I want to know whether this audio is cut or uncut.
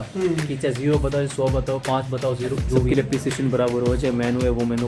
cut